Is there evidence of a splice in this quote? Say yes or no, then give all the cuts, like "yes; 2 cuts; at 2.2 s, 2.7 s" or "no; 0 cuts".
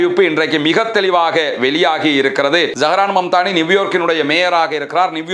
yes; 1 cut; at 2.7 s